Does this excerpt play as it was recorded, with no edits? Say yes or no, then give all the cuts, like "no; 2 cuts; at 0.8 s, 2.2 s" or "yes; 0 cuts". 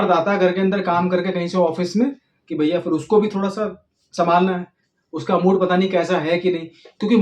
yes; 0 cuts